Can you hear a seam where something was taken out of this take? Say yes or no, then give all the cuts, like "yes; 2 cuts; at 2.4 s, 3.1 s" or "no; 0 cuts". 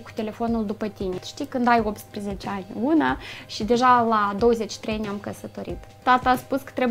yes; 2 cuts; at 1.2 s, 5.9 s